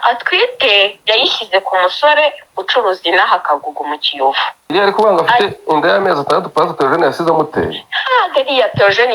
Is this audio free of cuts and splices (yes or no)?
no